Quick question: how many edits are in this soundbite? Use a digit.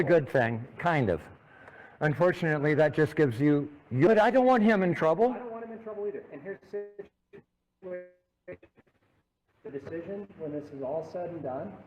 1